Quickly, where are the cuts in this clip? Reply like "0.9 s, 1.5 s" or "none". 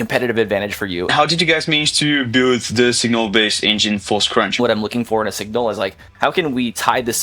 1.1 s, 4.6 s, 6.0 s